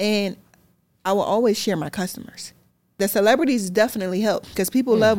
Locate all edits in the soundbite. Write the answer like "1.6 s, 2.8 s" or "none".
3.0 s

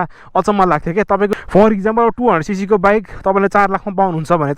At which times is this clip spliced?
1.3 s

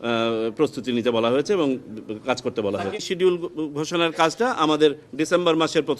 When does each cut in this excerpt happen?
3.0 s

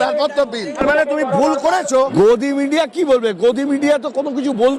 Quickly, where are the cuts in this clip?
0.8 s, 2.0 s

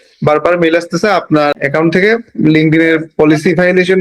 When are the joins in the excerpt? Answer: 1.6 s

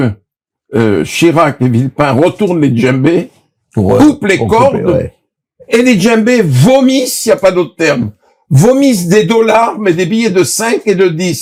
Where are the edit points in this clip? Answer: none

